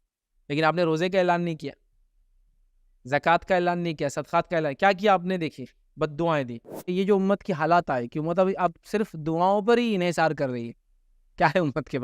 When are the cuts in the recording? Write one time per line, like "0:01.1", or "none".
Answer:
0:06.9